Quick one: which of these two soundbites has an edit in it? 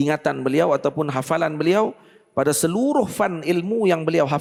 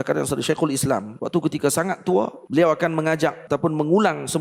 second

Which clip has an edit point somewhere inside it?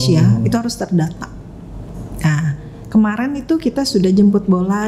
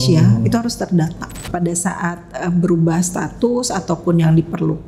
second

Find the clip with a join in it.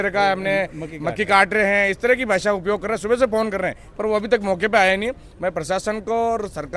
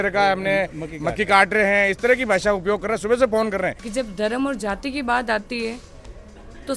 second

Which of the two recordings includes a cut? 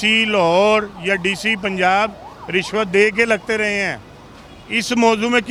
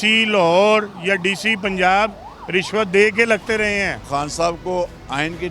second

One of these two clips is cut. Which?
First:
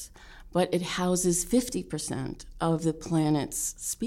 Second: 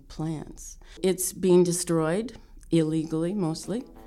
second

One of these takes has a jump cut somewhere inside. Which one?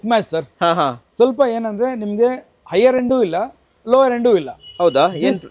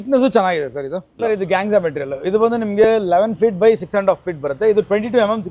second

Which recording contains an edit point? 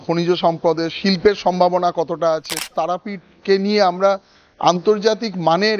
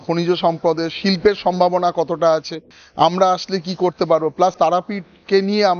first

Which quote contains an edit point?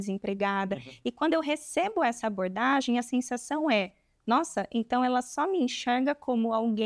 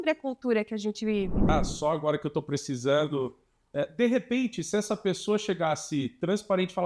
second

